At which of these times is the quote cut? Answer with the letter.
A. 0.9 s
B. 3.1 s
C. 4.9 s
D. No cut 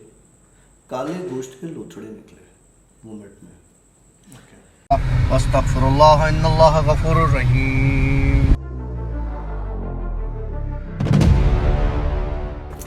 C